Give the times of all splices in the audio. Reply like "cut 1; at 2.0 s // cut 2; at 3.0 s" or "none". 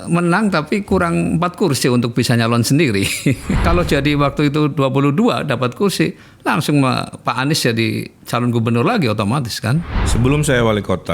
cut 1; at 3.6 s // cut 2; at 10.0 s